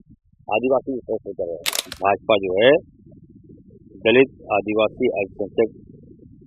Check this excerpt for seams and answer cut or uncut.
cut